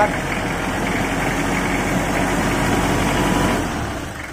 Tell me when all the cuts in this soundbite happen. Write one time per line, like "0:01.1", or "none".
none